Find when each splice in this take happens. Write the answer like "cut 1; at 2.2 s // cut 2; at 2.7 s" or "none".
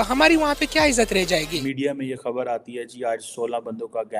cut 1; at 1.5 s

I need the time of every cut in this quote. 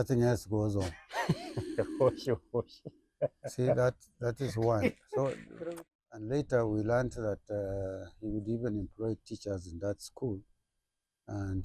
cut 1; at 5.5 s

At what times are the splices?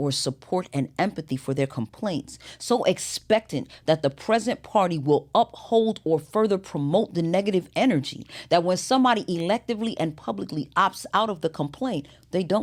none

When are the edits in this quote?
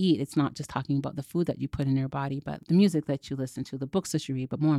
cut 1; at 2.5 s

